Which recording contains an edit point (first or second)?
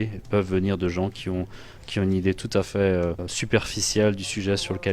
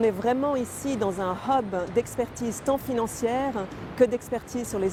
first